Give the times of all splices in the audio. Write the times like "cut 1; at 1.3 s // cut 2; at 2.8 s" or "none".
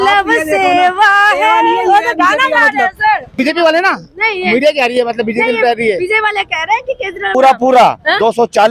cut 1; at 3.4 s // cut 2; at 7.3 s